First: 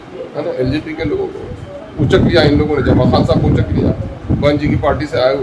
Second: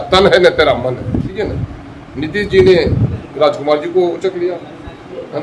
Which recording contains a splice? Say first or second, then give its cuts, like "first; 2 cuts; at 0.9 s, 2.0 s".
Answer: second; 1 cut; at 1.3 s